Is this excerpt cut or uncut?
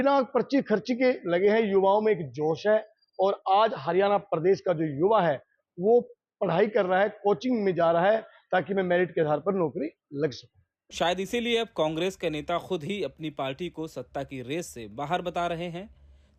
uncut